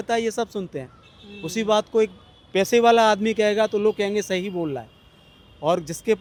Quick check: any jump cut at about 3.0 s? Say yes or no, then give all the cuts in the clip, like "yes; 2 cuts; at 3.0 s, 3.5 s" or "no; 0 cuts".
no; 0 cuts